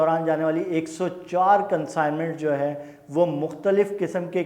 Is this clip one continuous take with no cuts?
yes; 0 cuts

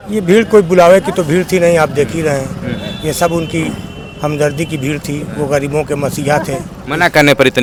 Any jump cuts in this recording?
no; 0 cuts

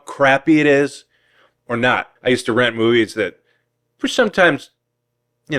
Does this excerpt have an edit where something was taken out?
yes; 1 cut; at 2.1 s

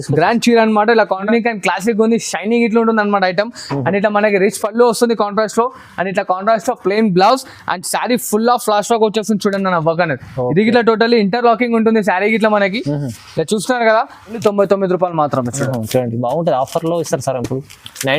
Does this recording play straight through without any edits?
no; 2 cuts; at 1.3 s, 14.4 s

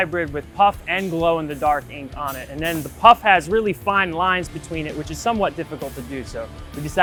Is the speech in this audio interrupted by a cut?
no; 0 cuts

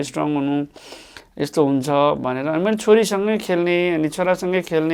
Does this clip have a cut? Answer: no; 0 cuts

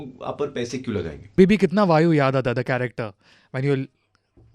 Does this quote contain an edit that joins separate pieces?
yes; 1 cut; at 1.4 s

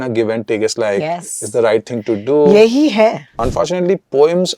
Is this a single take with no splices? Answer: no; 1 cut; at 3.4 s

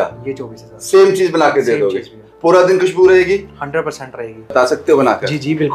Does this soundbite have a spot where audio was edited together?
yes; 1 cut; at 4.5 s

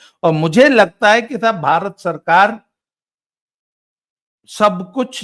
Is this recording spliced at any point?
no; 0 cuts

